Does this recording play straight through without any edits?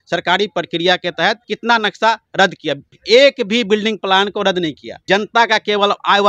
no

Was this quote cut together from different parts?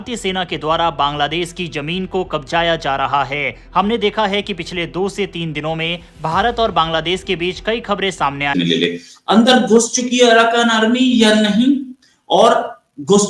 yes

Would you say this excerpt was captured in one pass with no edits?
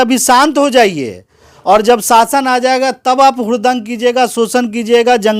yes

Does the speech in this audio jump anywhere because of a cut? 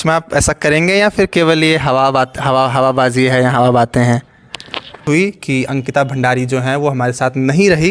yes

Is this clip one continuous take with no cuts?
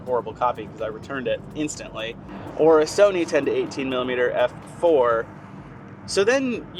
yes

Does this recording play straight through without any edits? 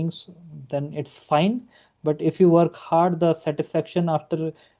yes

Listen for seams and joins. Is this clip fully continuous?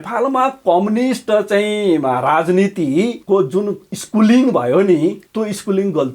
no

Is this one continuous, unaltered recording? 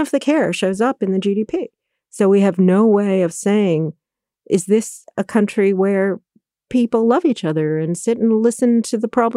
yes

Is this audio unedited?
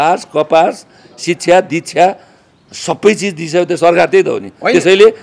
yes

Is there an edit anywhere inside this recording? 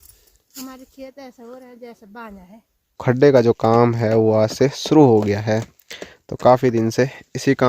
yes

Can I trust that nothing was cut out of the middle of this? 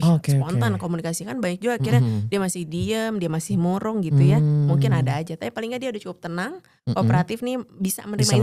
yes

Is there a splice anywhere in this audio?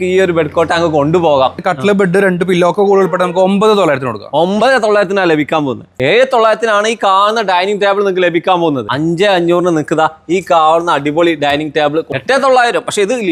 yes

